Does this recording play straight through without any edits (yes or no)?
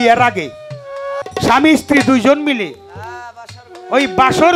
no